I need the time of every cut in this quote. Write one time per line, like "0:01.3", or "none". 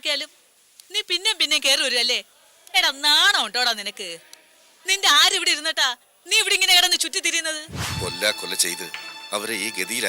0:07.8